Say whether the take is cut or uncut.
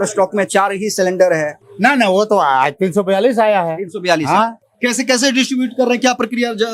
uncut